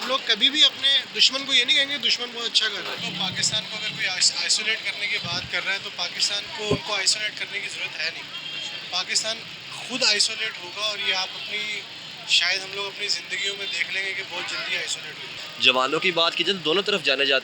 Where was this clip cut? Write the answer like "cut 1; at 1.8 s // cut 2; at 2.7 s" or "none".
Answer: cut 1; at 3.0 s // cut 2; at 15.4 s

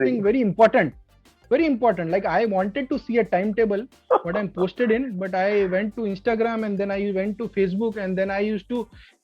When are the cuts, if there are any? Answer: none

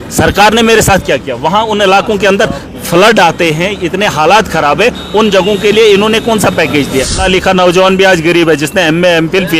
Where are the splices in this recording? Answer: cut 1; at 7.2 s

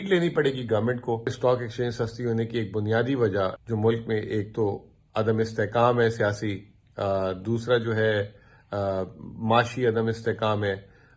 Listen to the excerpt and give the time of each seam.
cut 1; at 1.3 s // cut 2; at 3.6 s

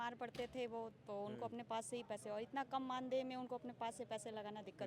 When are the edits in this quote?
none

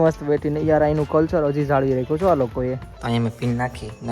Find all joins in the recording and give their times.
cut 1; at 2.9 s

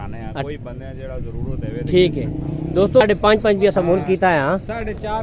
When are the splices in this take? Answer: cut 1; at 3.0 s

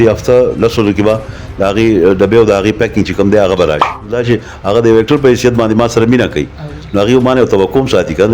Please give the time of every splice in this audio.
cut 1; at 4.2 s

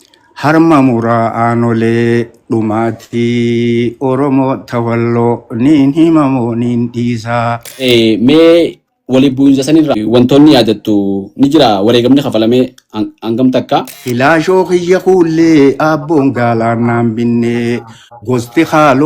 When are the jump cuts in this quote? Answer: cut 1; at 7.7 s // cut 2; at 10.0 s // cut 3; at 13.9 s

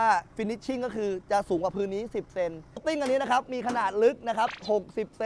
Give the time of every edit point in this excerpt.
cut 1; at 2.7 s

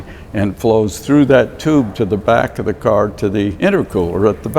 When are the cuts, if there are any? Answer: cut 1; at 3.5 s

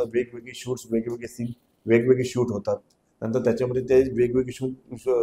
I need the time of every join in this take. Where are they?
none

